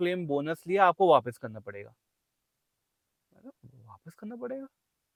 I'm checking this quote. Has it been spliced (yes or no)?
no